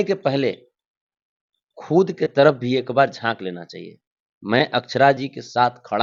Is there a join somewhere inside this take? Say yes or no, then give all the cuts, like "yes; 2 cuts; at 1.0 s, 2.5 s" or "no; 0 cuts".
no; 0 cuts